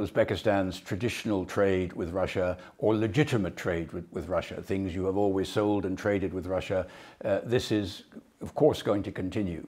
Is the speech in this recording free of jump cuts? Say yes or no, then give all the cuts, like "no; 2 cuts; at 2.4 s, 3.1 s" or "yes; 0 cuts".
yes; 0 cuts